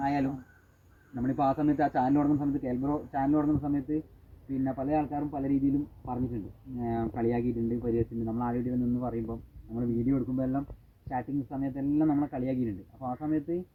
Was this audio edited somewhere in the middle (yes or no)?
no